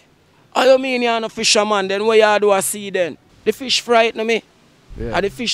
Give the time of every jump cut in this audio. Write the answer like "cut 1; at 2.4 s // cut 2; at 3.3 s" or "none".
cut 1; at 3.3 s